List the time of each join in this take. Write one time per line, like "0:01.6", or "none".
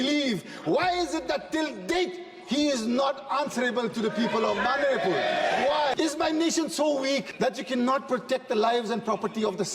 0:05.9
0:07.3